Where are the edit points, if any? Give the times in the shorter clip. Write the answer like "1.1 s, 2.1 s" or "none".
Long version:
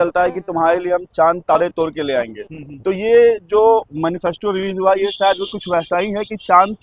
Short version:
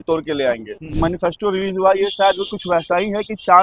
1.0 s